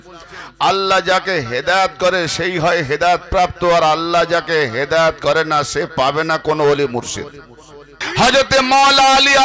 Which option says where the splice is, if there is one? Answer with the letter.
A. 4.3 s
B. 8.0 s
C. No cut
B